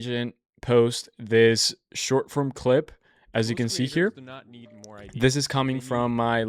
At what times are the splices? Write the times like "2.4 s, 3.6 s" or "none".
none